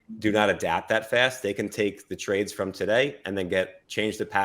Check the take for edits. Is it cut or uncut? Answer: uncut